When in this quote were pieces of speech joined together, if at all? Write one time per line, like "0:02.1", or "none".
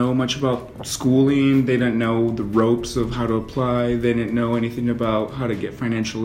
none